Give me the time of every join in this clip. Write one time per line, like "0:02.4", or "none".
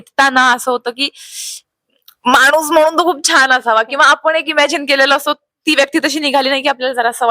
none